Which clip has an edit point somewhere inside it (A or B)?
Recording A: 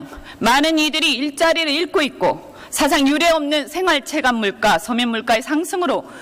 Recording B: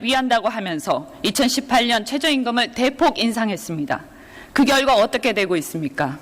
B